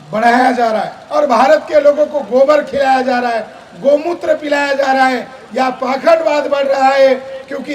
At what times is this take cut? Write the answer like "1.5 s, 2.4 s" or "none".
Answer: 1.0 s